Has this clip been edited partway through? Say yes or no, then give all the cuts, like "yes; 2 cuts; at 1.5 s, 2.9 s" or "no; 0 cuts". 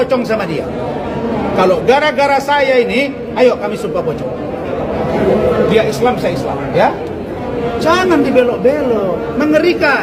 no; 0 cuts